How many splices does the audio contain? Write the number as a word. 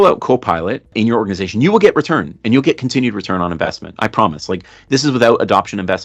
one